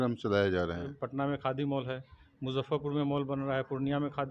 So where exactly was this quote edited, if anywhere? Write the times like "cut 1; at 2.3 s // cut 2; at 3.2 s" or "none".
cut 1; at 0.9 s